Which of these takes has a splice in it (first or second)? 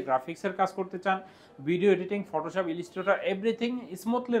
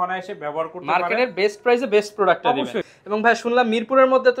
second